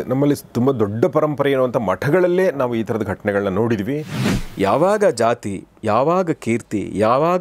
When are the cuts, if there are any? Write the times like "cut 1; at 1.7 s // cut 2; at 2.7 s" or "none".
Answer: cut 1; at 4.3 s